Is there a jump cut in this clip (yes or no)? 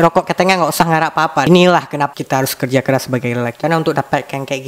yes